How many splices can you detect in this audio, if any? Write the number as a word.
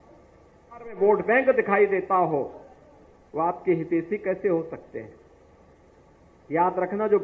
one